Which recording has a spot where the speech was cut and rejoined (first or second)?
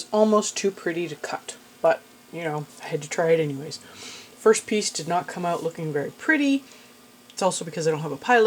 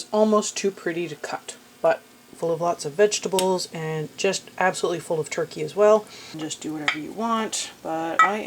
second